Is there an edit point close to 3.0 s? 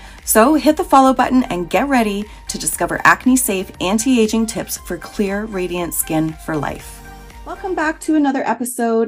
no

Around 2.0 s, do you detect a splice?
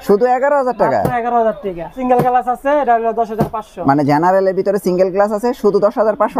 yes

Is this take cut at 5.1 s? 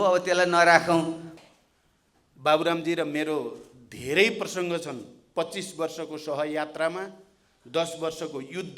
no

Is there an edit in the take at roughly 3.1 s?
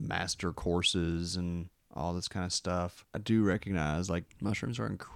yes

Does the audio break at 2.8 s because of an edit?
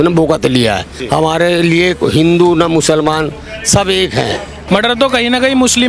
no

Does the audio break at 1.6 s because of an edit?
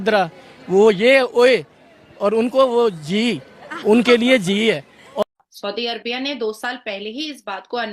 no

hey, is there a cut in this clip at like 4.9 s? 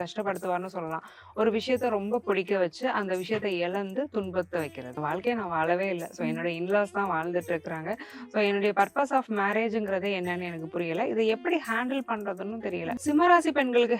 yes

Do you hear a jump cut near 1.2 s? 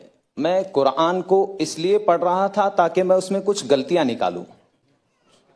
no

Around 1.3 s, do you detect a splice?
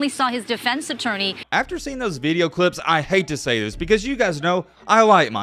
yes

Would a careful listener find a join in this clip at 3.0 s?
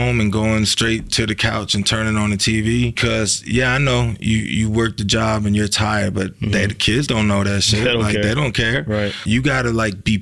yes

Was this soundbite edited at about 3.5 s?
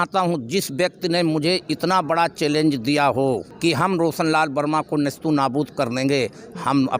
yes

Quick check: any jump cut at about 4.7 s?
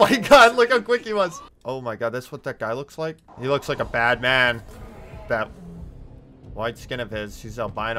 no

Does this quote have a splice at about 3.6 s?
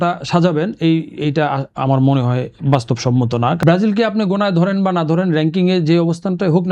yes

